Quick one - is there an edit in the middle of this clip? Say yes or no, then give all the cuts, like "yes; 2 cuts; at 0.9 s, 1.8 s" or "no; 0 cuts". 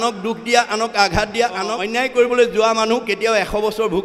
yes; 1 cut; at 1.8 s